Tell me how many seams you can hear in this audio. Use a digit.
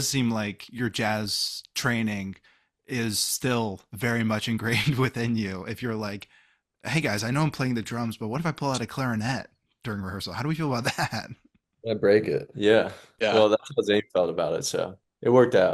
0